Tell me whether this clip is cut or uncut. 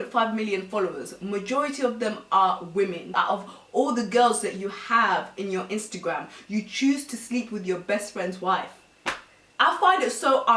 cut